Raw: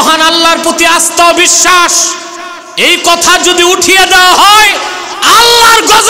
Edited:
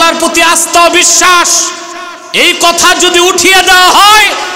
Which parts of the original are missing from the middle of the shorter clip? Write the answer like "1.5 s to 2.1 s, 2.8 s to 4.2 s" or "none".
none